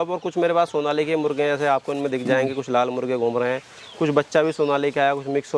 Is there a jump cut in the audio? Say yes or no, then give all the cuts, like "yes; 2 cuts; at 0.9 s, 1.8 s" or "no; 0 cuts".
no; 0 cuts